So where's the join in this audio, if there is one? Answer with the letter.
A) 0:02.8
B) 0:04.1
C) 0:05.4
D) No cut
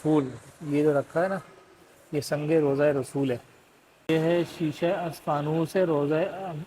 B